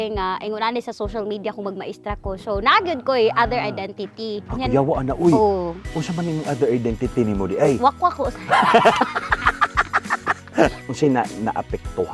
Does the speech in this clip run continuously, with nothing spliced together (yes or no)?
no